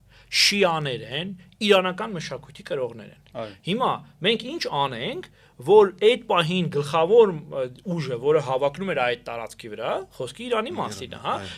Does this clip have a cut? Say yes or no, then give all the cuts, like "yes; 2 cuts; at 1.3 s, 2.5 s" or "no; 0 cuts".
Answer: no; 0 cuts